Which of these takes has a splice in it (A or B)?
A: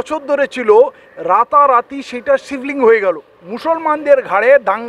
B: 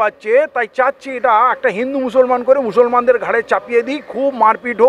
A